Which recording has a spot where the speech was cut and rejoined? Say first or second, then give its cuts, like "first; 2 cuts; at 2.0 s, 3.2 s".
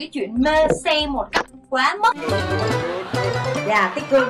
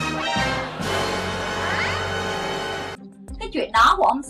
second; 1 cut; at 2.9 s